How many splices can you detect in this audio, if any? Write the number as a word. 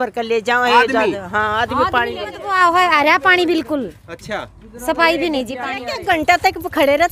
two